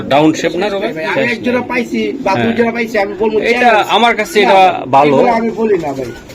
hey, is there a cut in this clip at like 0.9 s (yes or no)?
yes